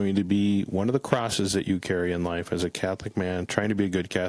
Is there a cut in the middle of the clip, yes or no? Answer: no